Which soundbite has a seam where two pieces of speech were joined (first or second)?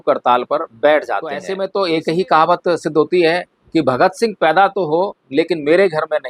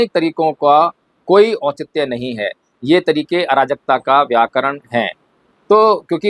first